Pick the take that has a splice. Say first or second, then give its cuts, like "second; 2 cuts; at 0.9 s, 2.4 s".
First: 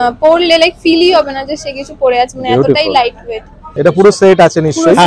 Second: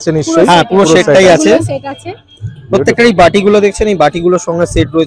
first; 1 cut; at 3.6 s